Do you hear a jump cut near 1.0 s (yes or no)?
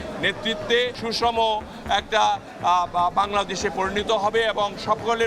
yes